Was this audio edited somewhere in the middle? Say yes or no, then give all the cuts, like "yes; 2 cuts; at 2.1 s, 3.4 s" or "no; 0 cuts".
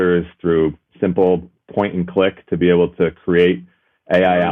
no; 0 cuts